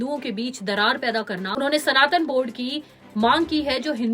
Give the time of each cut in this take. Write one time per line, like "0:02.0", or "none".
0:01.5